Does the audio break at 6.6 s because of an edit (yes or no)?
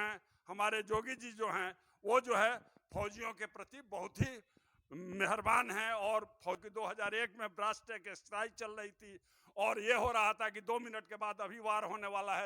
yes